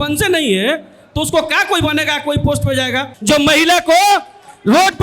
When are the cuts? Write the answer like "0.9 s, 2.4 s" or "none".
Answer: 3.1 s